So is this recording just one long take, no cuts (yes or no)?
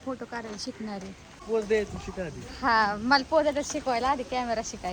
no